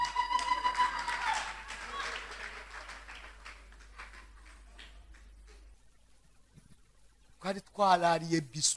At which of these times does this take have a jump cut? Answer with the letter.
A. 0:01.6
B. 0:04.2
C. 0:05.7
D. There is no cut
C